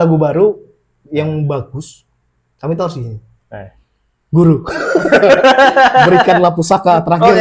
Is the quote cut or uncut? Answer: uncut